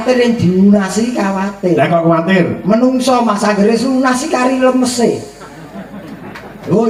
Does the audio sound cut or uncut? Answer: uncut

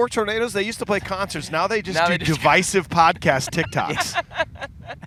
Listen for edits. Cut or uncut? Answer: uncut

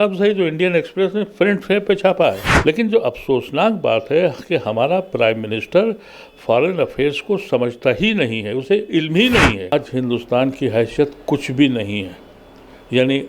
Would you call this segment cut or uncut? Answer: cut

